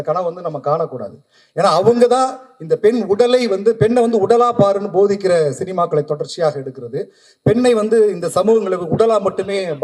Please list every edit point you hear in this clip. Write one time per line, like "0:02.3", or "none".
none